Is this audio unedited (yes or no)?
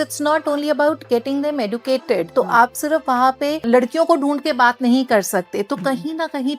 no